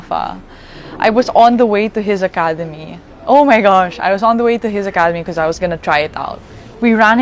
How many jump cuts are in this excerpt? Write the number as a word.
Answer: zero